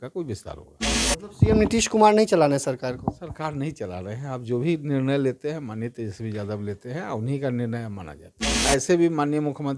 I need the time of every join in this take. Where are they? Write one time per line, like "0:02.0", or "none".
0:08.6